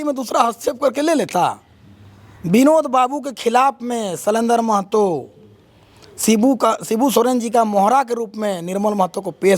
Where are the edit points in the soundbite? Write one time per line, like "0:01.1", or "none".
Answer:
none